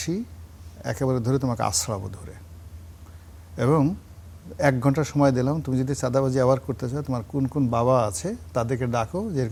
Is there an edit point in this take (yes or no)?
no